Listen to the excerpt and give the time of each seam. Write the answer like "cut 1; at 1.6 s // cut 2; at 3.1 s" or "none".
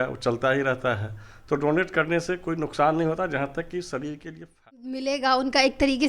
cut 1; at 4.7 s

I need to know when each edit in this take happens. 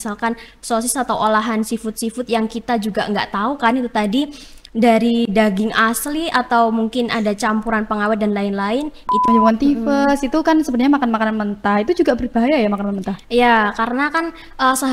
cut 1; at 9.2 s

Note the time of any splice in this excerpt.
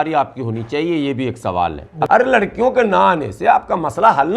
cut 1; at 2.1 s

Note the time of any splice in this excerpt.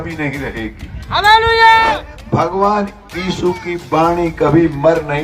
cut 1; at 2.1 s

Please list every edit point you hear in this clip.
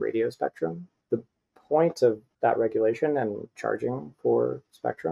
cut 1; at 0.9 s // cut 2; at 2.3 s

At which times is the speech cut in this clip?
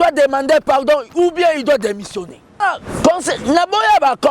cut 1; at 2.6 s

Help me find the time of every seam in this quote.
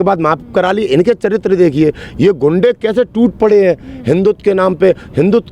none

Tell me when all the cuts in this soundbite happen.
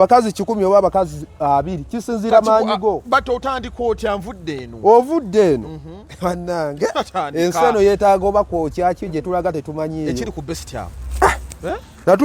none

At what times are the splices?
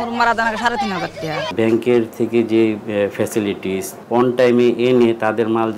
cut 1; at 1.5 s // cut 2; at 3.9 s

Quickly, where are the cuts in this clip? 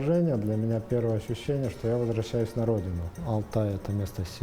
cut 1; at 3.2 s

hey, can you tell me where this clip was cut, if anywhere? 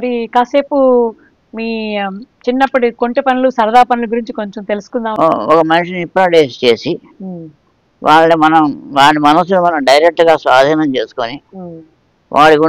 cut 1; at 5.1 s

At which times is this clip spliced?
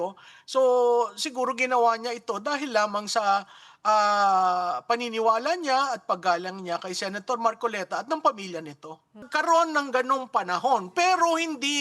cut 1; at 9.2 s

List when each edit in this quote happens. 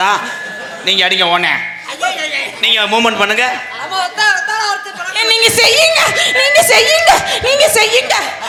none

